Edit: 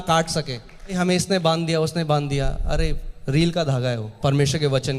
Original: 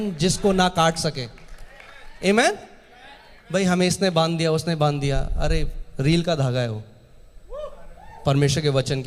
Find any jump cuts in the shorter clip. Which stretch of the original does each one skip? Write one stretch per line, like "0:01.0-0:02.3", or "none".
0:01.6-0:03.6
0:06.8-0:08.1

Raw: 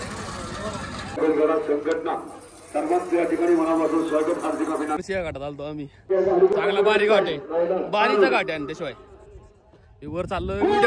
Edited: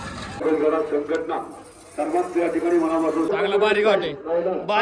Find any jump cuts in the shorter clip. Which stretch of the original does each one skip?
0:04.1-0:06.5

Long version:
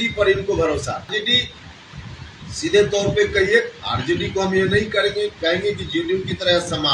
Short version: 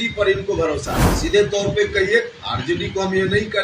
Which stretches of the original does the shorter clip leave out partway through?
0:01.0-0:02.4

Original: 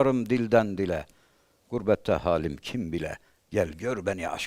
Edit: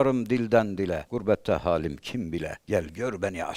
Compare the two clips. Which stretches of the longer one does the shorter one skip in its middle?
0:01.1-0:01.7
0:03.2-0:03.4

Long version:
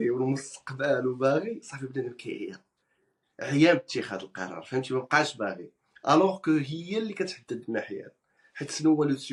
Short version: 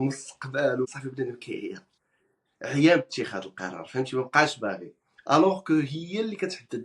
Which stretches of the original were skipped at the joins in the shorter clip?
0:01.2-0:01.7

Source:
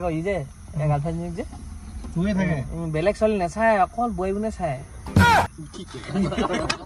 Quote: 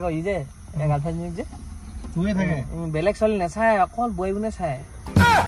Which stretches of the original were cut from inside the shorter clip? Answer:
none

